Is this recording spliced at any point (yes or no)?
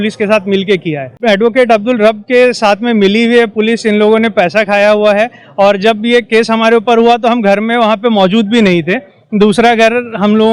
yes